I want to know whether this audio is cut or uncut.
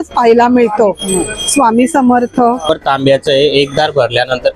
cut